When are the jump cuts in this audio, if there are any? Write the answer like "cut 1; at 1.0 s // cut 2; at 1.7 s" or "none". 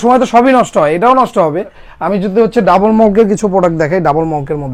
none